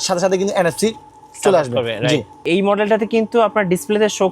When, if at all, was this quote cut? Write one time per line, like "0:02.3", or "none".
0:02.4